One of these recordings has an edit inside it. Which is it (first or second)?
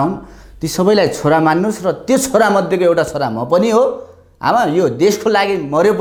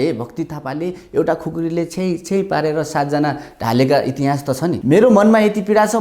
second